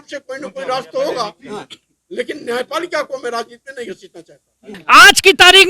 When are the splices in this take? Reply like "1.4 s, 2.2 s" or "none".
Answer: 4.7 s

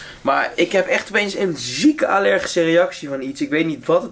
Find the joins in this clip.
none

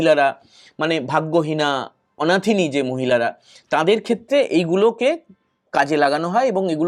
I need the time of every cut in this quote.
none

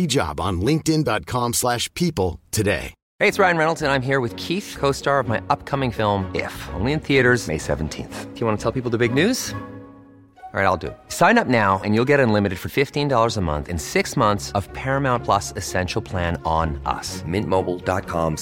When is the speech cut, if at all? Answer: 3.0 s

